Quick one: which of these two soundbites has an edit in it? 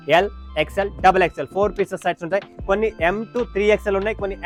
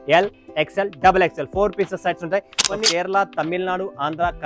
second; 1 cut; at 2.6 s

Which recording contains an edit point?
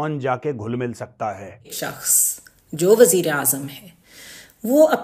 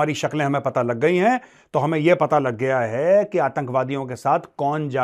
first; 1 cut; at 1.8 s

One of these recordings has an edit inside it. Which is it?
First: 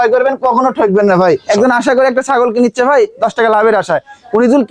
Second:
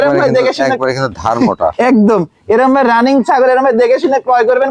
first; 1 cut; at 1.4 s

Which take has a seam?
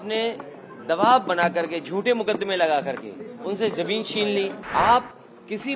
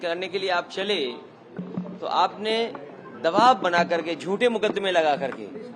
first; 1 cut; at 4.6 s

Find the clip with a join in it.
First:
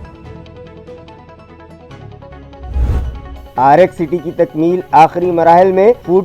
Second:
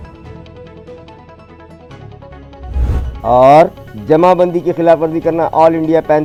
first; 1 cut; at 3.2 s

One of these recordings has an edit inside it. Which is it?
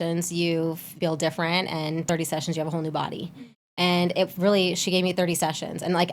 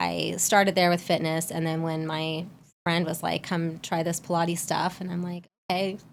first; 2 cuts; at 0.9 s, 2.0 s

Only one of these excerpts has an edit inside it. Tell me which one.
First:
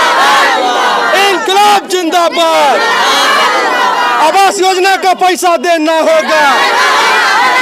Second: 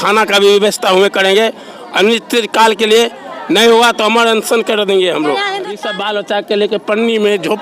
second; 1 cut; at 5.8 s

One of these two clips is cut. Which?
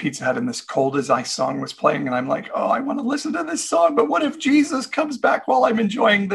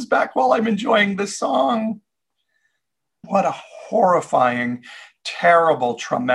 second; 1 cut; at 3.1 s

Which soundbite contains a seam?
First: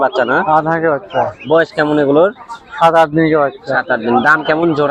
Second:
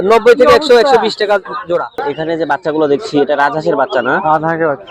second; 1 cut; at 2.0 s

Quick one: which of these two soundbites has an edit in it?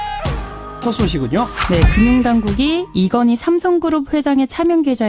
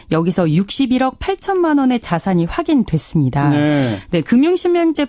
second; 1 cut; at 2.2 s

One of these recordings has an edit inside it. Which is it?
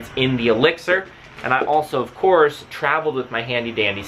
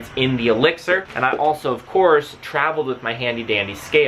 second; 1 cut; at 1.1 s

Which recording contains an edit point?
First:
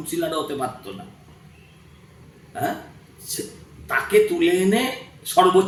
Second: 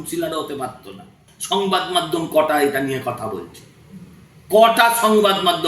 second; 1 cut; at 1.3 s

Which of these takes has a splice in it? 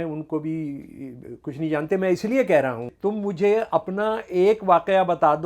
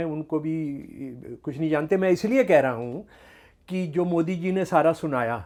first; 1 cut; at 2.9 s

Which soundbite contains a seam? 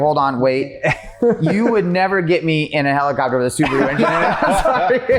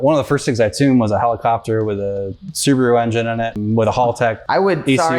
second; 2 cuts; at 3.6 s, 4.4 s

